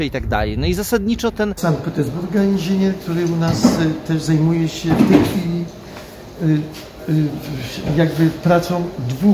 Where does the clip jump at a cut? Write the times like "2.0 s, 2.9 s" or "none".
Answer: 1.6 s